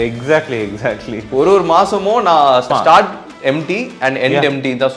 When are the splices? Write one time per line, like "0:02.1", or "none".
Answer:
0:02.7

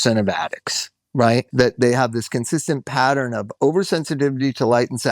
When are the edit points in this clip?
0:01.5

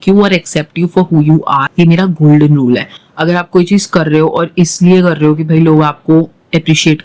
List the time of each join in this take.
0:01.7

